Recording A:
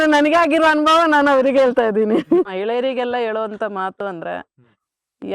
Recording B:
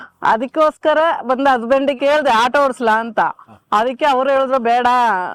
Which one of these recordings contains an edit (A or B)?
A